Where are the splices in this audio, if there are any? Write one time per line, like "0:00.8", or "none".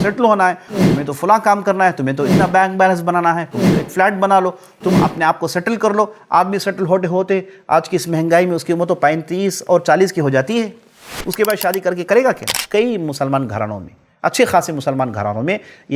0:12.5